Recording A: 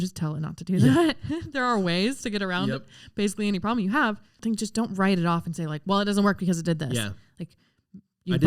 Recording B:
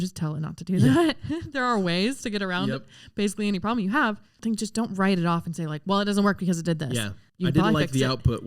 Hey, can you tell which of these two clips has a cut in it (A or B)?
B